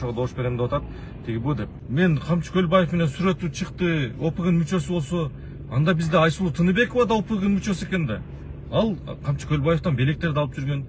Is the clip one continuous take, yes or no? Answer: no